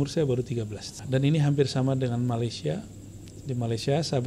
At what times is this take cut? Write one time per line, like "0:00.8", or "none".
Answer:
0:01.0